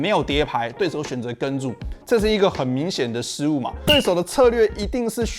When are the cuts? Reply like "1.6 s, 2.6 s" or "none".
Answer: 0.8 s, 3.7 s